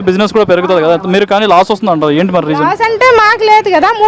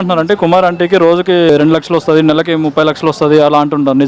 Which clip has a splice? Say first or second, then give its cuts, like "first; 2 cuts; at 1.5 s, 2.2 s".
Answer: second; 1 cut; at 1.5 s